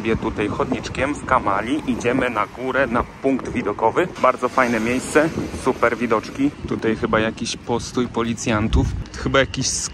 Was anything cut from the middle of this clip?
no; 0 cuts

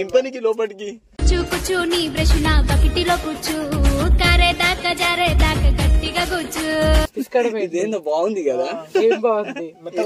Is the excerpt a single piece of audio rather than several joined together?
no; 1 cut; at 7.1 s

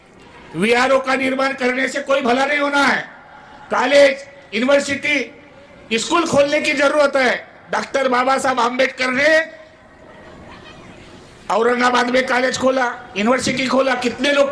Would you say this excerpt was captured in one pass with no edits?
yes; 0 cuts

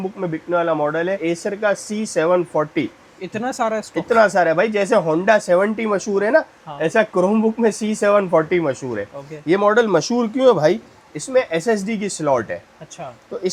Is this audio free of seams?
yes; 0 cuts

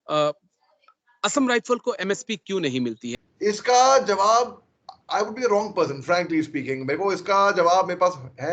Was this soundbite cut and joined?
yes; 1 cut; at 3.0 s

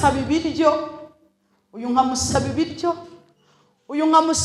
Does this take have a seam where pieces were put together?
no; 0 cuts

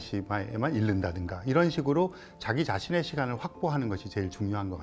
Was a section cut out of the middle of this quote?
no; 0 cuts

